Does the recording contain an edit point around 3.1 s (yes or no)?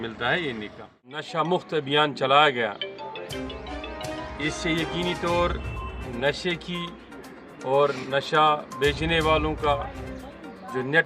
no